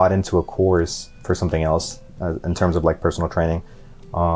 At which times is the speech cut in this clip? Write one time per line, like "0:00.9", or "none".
0:01.1
0:02.1